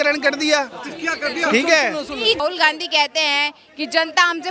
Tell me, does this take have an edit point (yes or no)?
yes